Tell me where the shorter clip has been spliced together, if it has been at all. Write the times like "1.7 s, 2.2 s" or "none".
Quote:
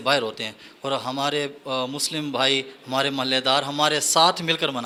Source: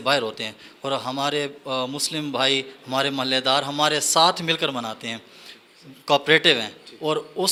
none